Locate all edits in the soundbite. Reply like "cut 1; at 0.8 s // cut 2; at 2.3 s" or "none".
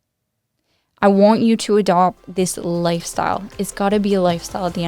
none